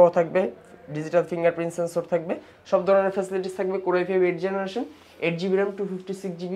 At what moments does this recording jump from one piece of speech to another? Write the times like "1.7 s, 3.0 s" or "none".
none